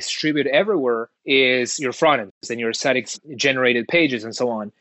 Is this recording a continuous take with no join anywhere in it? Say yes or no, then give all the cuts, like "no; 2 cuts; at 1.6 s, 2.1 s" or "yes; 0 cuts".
no; 2 cuts; at 1.1 s, 2.5 s